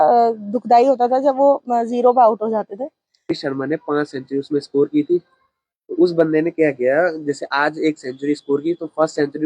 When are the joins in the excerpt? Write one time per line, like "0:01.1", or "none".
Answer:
0:03.4

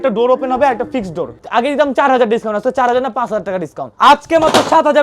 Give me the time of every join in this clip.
0:01.4
0:03.8

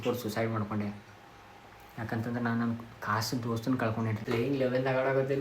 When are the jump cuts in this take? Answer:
0:04.2

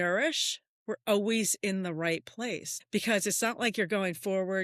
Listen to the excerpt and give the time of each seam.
0:02.7

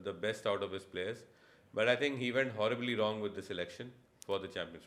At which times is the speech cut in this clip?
none

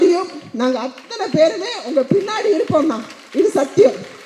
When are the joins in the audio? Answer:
none

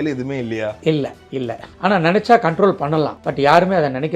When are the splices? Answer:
0:01.1
0:03.2

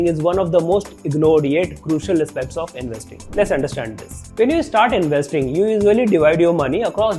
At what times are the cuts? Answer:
none

